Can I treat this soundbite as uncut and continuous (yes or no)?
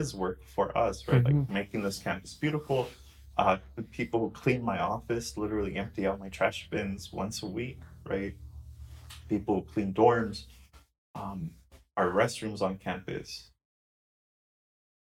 yes